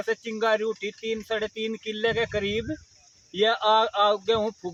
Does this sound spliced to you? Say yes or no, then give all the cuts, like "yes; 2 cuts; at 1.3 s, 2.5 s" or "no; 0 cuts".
no; 0 cuts